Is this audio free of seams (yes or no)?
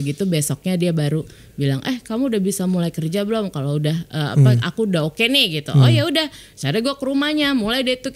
yes